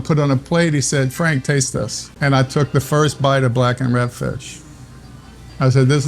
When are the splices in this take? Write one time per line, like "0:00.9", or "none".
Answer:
0:02.0